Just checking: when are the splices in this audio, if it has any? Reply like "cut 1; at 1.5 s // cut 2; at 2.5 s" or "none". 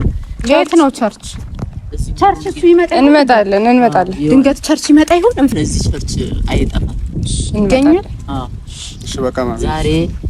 cut 1; at 5.5 s